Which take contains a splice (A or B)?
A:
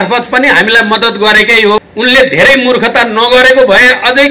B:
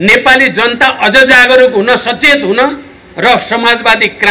A